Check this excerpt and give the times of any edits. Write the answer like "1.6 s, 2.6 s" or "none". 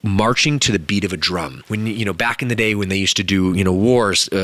1.6 s